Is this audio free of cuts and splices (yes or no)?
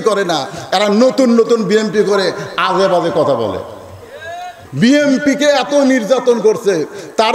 no